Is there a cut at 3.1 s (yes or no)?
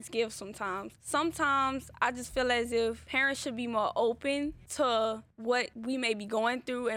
yes